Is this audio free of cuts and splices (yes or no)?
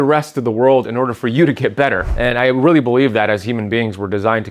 no